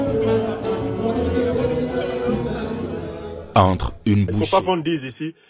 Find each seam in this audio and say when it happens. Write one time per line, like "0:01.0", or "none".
0:04.3